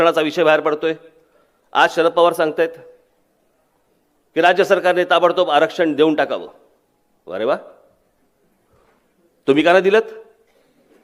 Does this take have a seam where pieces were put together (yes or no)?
no